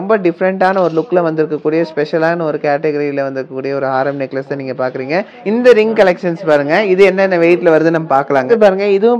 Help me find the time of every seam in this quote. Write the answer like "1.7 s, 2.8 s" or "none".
5.4 s, 8.4 s